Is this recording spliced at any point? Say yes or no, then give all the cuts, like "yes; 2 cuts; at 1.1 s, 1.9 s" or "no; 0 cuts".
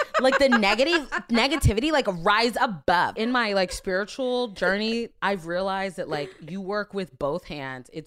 yes; 1 cut; at 3.1 s